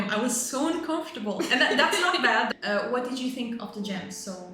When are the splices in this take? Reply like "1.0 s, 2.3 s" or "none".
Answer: 2.5 s